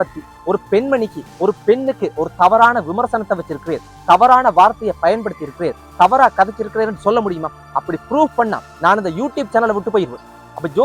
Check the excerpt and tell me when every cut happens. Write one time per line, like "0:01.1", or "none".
none